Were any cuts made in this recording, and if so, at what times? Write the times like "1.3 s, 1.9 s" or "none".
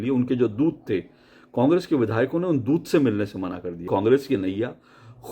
3.8 s